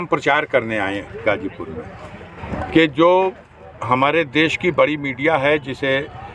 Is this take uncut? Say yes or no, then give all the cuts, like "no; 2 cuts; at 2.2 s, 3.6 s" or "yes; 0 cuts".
no; 1 cut; at 2.3 s